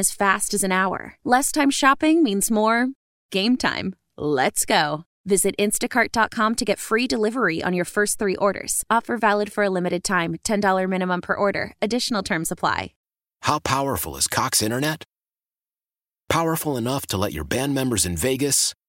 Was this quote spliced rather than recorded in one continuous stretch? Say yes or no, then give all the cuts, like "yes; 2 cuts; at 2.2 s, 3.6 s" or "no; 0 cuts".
yes; 1 cut; at 13.0 s